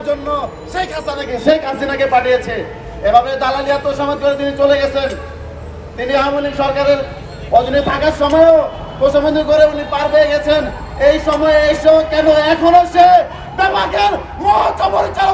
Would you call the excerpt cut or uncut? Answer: uncut